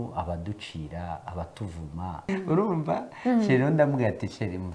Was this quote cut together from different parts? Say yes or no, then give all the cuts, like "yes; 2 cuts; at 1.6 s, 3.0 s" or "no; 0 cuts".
yes; 1 cut; at 2.3 s